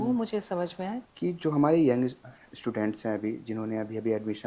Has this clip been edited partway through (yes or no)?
yes